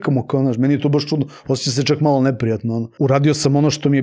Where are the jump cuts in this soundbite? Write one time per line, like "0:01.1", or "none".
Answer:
0:02.9